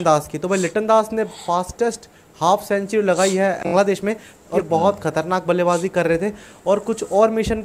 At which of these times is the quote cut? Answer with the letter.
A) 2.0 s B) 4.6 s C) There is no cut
B